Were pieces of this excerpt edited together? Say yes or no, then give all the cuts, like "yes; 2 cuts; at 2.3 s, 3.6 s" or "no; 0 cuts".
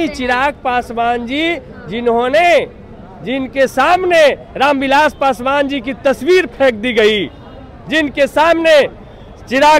no; 0 cuts